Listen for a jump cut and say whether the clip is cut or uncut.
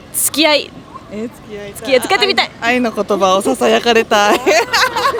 uncut